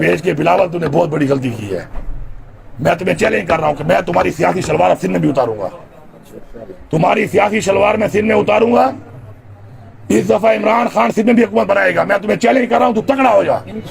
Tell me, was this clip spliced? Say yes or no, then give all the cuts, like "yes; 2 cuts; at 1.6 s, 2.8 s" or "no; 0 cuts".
no; 0 cuts